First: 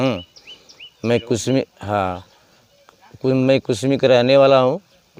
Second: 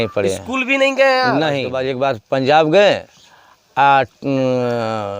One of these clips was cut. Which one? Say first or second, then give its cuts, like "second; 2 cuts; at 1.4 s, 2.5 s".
second; 1 cut; at 1.8 s